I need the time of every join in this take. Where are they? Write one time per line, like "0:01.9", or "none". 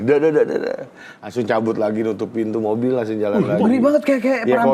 none